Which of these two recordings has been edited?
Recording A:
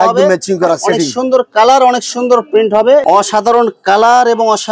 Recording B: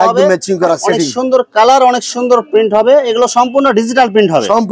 A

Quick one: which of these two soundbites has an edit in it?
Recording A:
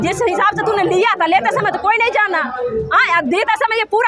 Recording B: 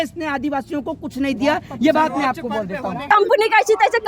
B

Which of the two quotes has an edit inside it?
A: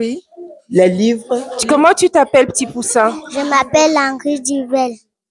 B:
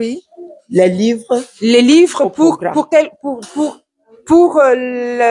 A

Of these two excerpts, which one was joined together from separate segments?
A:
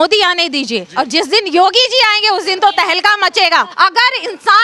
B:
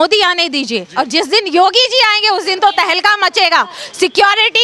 A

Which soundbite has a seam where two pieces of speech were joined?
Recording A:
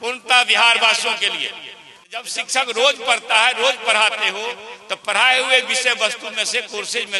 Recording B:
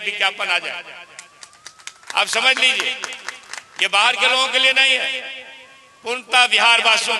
A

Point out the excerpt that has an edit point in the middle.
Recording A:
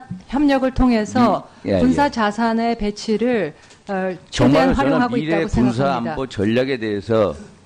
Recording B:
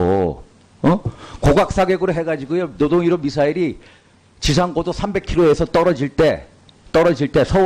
A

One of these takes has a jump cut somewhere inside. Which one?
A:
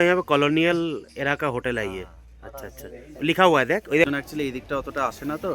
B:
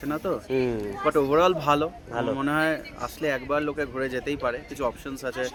A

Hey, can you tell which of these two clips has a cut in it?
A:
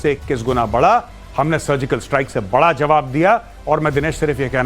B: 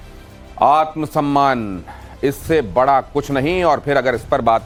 A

